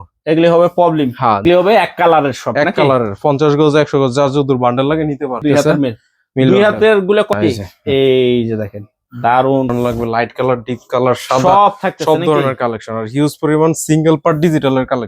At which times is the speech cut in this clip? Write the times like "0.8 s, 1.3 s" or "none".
1.4 s, 5.4 s, 7.3 s, 9.7 s